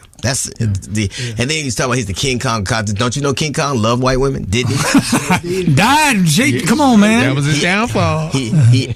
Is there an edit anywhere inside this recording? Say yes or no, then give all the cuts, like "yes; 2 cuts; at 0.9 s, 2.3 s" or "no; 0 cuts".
no; 0 cuts